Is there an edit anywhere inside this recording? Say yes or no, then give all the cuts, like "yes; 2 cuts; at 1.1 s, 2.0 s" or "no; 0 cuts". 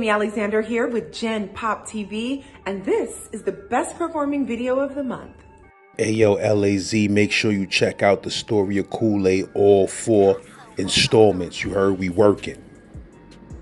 no; 0 cuts